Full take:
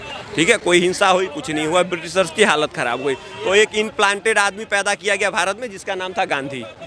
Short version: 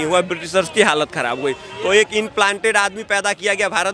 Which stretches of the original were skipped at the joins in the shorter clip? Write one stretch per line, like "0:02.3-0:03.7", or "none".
none